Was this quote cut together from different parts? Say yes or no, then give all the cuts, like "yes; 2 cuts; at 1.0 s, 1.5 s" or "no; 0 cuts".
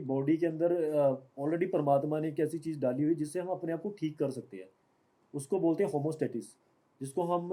no; 0 cuts